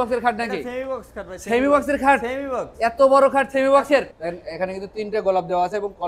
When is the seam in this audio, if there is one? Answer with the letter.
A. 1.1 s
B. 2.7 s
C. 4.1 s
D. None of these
C